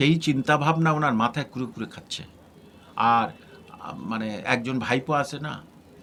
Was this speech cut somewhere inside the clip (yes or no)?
no